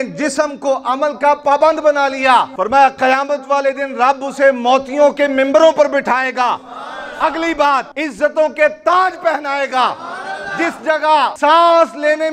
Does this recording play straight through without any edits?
no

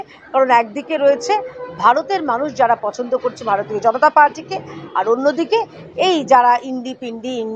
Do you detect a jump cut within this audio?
no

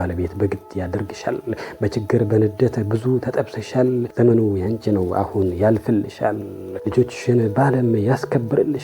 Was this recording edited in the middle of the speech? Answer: yes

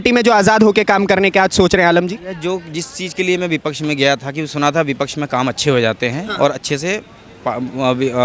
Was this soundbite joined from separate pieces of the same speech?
no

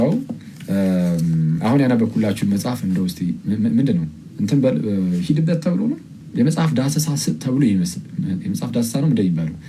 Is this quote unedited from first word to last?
no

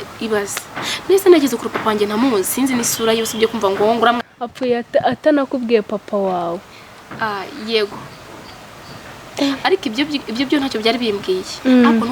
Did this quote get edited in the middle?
yes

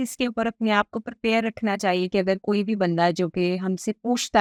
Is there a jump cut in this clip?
no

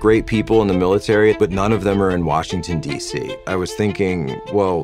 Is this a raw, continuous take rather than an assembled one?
no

